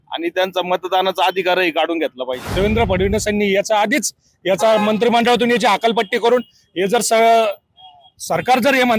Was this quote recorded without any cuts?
no; 1 cut; at 2.4 s

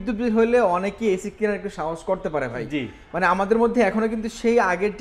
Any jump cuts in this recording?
no; 0 cuts

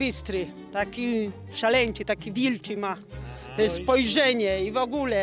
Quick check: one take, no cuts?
yes; 0 cuts

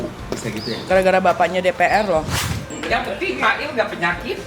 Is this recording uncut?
no; 1 cut; at 2.7 s

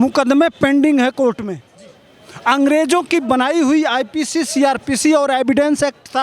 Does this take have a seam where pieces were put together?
no; 0 cuts

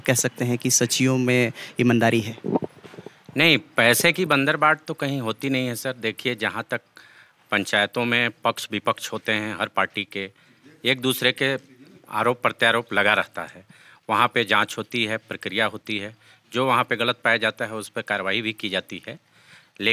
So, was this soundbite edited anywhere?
no; 0 cuts

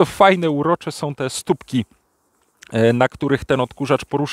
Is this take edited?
no; 0 cuts

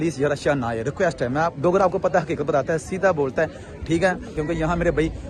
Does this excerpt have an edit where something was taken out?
yes; 1 cut; at 4.4 s

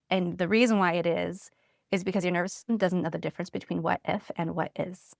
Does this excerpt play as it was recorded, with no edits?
yes; 0 cuts

